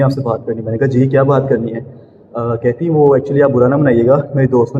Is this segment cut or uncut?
uncut